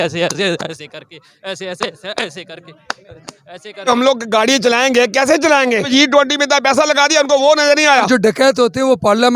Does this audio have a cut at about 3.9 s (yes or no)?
yes